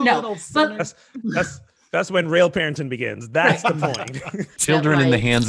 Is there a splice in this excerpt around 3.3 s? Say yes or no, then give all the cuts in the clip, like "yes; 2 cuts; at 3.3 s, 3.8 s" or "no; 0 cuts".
no; 1 cut; at 4.6 s